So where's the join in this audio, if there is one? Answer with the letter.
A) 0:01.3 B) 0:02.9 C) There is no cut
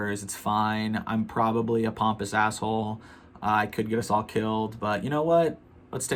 C